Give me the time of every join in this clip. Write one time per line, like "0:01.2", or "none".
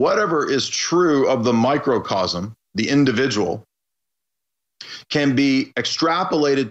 0:01.2